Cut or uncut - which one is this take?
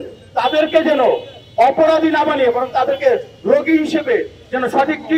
uncut